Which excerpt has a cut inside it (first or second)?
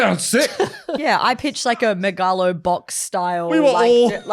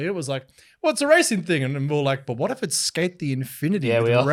first